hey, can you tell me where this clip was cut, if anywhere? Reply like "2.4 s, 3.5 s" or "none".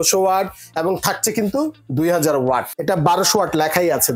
2.7 s